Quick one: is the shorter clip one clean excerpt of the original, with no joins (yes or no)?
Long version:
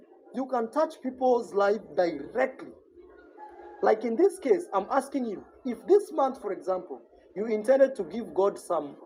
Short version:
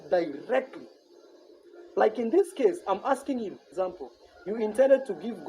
no